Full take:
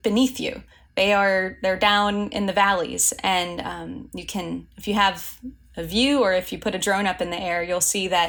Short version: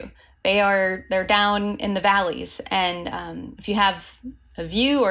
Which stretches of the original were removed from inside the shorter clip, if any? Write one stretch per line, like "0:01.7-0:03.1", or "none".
0:04.0-0:04.7